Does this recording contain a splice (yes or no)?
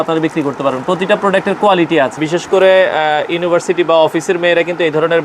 yes